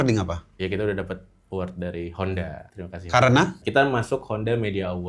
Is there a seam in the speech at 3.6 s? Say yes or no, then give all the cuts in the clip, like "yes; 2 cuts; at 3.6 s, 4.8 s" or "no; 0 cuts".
yes; 1 cut; at 3.6 s